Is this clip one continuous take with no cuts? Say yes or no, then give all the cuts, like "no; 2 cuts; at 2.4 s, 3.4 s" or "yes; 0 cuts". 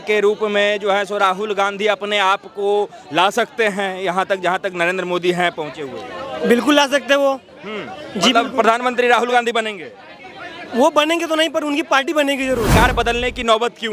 no; 1 cut; at 12.7 s